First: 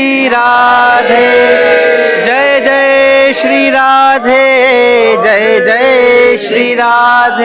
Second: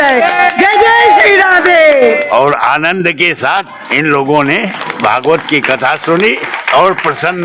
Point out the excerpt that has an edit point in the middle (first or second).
second